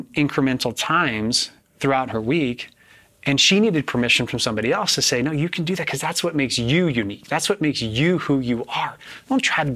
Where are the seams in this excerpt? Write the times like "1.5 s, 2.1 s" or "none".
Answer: none

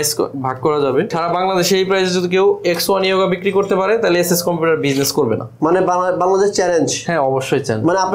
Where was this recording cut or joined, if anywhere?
1.1 s, 5.5 s

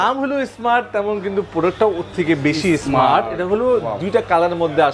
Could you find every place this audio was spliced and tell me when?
none

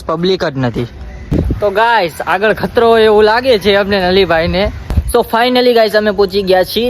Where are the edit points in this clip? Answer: 1.5 s, 4.9 s

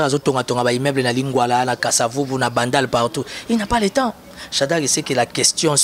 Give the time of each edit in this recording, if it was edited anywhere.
none

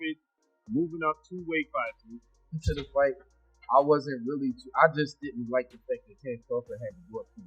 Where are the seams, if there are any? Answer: 2.6 s

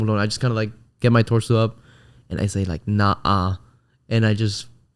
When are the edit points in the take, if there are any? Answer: none

